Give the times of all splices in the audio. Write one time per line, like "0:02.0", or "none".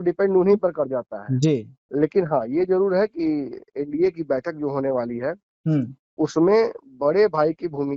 none